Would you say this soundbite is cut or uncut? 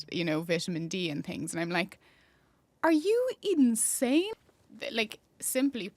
cut